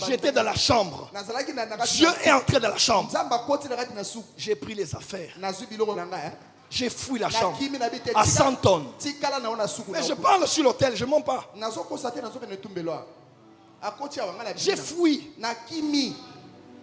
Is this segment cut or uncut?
uncut